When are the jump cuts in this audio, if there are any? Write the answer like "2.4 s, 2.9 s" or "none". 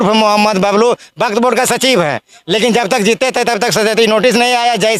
none